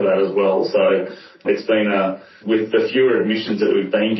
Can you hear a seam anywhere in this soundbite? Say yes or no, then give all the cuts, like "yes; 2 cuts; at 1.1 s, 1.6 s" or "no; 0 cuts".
no; 0 cuts